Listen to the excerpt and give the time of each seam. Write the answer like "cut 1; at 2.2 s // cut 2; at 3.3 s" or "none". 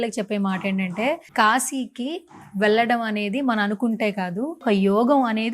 cut 1; at 1.2 s // cut 2; at 4.6 s